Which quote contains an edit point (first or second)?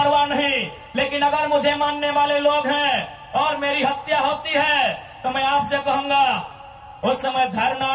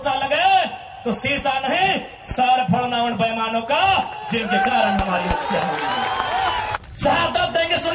second